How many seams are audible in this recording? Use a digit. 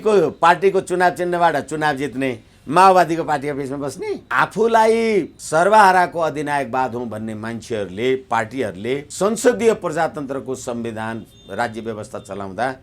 3